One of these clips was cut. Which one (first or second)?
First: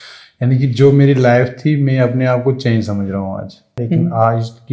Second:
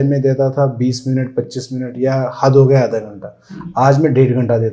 first